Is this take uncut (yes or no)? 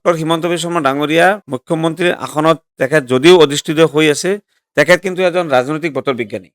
no